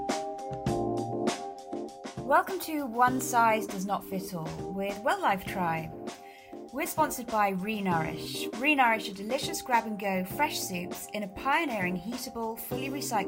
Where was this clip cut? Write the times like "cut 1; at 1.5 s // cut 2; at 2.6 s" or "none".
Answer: cut 1; at 2.2 s